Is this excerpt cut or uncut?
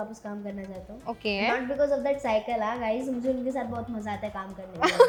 uncut